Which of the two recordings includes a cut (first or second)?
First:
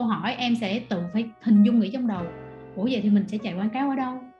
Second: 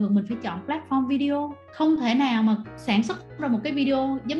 second